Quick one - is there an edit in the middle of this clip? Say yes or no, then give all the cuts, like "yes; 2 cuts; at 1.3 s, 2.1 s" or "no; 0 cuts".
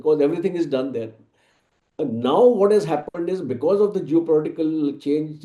no; 0 cuts